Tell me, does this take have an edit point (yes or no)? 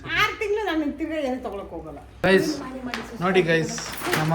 yes